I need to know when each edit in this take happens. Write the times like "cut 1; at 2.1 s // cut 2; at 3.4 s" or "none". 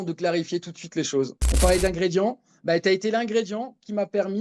cut 1; at 1.4 s